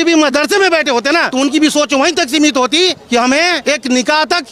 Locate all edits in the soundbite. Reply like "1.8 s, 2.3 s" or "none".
1.3 s, 3.6 s